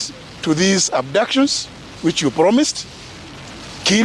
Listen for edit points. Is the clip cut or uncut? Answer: uncut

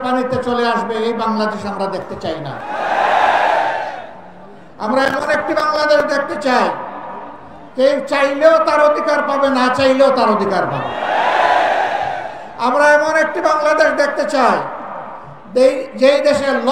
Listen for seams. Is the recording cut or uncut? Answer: uncut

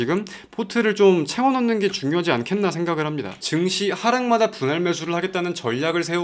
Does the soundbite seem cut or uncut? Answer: cut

